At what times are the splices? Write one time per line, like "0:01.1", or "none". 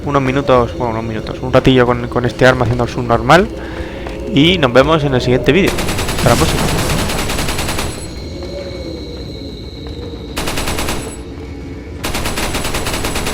0:10.3